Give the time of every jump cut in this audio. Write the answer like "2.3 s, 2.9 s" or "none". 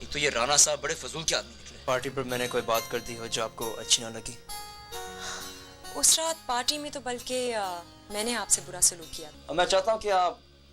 1.8 s, 9.3 s